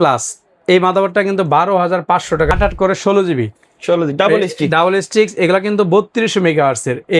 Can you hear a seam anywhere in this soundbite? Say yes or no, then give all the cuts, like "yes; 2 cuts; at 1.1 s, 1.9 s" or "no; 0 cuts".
yes; 1 cut; at 2.5 s